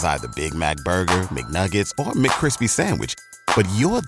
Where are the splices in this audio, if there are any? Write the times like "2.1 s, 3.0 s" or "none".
none